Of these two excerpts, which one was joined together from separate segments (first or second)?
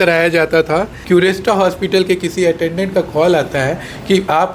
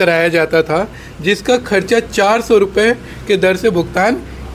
first